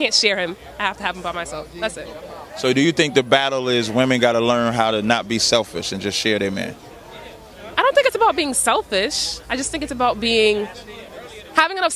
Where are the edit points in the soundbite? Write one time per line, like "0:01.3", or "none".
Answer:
none